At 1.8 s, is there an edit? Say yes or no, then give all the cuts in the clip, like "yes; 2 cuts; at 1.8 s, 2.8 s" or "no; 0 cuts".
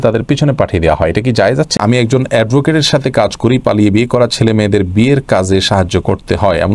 yes; 1 cut; at 1.8 s